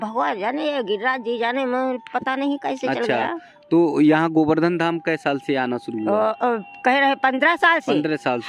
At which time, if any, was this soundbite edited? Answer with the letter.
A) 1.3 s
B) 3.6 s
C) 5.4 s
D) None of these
D